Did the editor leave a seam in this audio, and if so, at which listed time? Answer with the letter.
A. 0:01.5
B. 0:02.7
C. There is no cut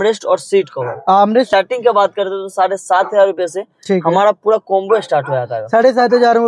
A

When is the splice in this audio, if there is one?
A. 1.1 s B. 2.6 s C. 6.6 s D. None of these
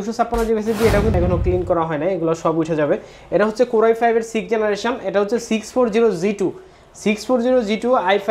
A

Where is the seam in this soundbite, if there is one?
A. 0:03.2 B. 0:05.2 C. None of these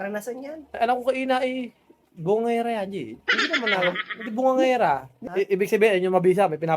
B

